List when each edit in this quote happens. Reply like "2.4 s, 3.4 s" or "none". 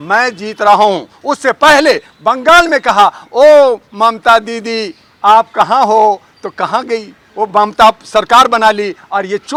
none